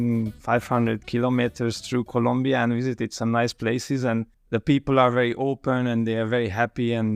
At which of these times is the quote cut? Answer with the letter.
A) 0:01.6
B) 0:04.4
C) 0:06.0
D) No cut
B